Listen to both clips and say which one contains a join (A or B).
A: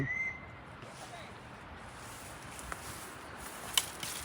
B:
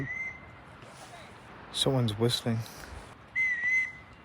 B